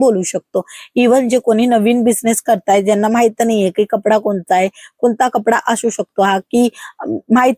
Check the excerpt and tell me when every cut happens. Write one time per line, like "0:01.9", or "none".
none